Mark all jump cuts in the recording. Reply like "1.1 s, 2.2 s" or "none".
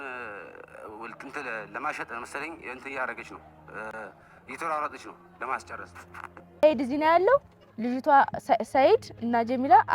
6.6 s